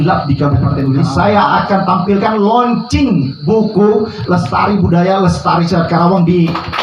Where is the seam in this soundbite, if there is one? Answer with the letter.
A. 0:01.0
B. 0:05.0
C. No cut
A